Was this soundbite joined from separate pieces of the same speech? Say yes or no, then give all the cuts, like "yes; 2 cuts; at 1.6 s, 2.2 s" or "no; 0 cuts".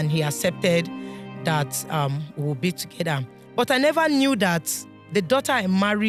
no; 0 cuts